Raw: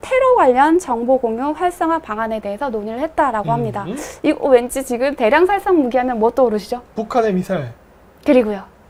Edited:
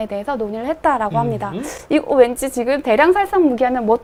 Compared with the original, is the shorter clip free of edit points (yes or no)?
yes